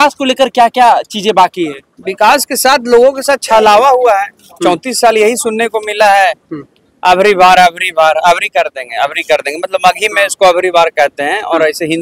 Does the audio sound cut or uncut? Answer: uncut